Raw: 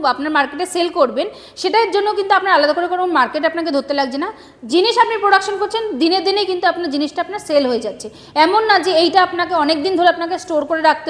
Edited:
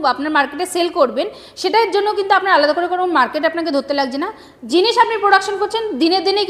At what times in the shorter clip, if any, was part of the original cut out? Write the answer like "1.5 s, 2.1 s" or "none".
none